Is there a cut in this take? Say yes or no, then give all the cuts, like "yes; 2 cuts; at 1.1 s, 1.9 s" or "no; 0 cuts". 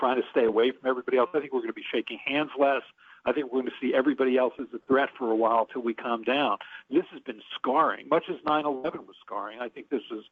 no; 0 cuts